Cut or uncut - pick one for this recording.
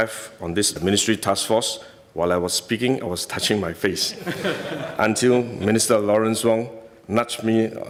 uncut